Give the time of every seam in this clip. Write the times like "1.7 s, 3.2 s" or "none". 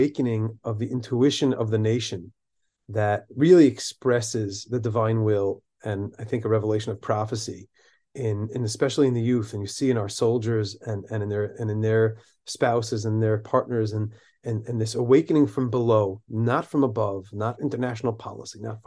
none